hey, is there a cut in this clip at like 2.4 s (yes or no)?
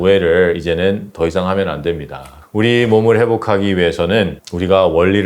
yes